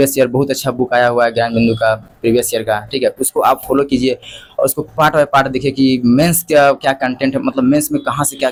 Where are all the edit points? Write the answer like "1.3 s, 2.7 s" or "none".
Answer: none